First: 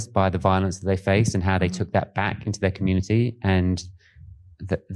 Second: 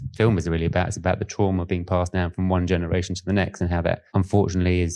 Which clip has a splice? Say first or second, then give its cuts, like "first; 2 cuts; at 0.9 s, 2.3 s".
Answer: second; 1 cut; at 4.0 s